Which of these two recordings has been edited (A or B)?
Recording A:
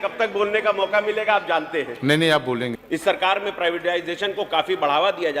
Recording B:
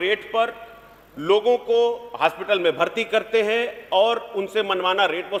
A